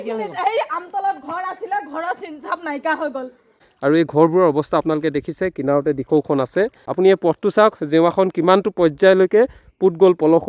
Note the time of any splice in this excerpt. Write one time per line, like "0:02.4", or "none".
0:03.6
0:06.8